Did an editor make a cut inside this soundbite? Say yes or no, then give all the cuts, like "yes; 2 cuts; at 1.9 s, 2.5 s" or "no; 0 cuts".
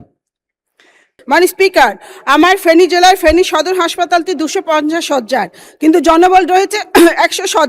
yes; 1 cut; at 1.1 s